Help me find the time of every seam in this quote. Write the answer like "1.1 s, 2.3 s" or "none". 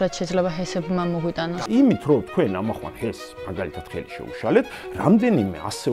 1.5 s